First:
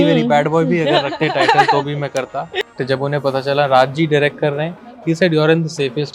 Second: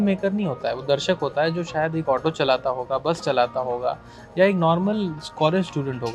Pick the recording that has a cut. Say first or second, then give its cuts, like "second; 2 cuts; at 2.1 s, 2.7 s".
first; 1 cut; at 2.7 s